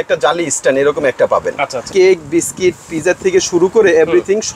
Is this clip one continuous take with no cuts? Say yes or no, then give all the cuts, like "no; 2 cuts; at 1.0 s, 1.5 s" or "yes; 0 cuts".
no; 1 cut; at 1.8 s